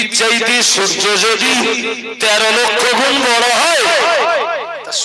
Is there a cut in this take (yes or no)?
no